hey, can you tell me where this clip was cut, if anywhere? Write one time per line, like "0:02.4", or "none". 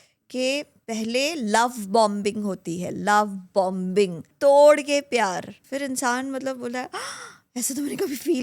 0:04.3
0:05.6